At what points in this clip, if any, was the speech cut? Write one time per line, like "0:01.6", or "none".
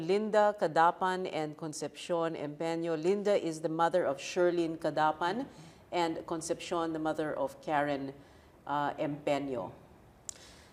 none